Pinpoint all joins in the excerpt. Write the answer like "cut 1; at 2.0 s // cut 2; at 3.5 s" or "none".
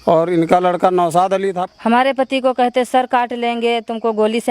cut 1; at 1.6 s